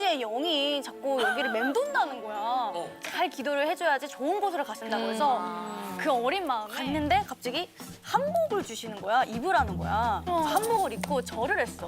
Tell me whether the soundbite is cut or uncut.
cut